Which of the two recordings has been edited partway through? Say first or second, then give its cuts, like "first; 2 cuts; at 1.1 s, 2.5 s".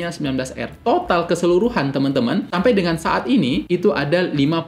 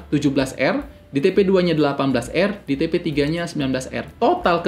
first; 2 cuts; at 2.5 s, 3.6 s